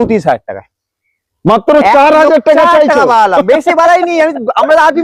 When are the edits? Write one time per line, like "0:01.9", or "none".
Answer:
none